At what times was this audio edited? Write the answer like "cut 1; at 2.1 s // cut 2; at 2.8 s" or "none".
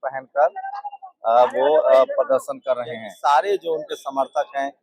cut 1; at 3.1 s